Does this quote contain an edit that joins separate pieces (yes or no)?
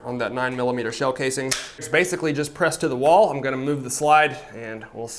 yes